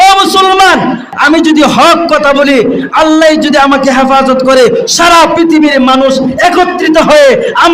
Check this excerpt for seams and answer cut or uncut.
cut